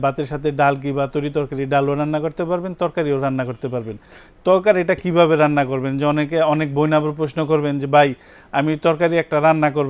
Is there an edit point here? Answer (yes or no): no